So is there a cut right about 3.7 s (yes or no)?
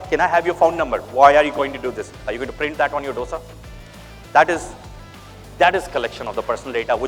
no